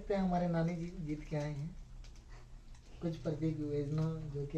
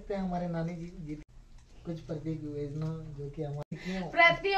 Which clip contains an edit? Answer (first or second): second